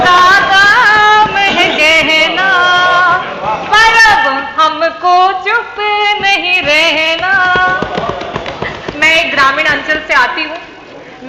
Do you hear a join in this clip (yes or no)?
no